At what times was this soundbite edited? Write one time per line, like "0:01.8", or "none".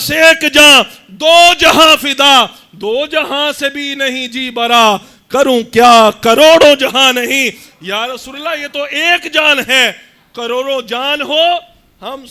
none